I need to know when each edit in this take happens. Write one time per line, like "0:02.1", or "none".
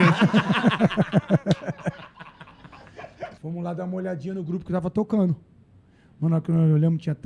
0:03.3